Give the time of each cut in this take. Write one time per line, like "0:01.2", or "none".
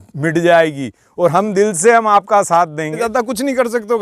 0:02.8